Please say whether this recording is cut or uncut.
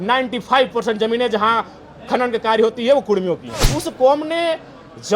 cut